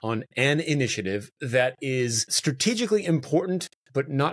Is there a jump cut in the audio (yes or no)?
no